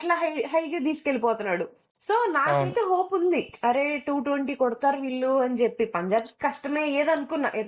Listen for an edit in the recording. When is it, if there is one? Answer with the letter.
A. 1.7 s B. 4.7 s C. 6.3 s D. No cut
D